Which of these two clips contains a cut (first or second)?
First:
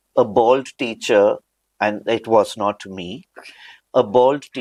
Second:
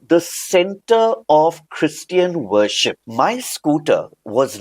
second